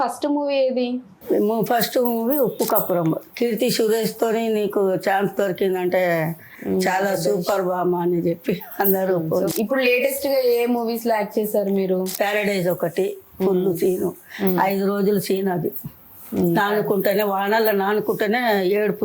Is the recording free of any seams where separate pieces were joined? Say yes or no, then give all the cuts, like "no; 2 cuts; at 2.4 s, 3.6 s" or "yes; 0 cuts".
no; 3 cuts; at 3.3 s, 9.5 s, 12.1 s